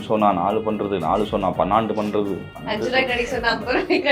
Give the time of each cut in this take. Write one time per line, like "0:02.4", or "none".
none